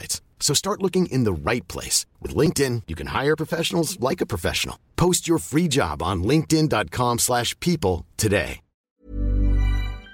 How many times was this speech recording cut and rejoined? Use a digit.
1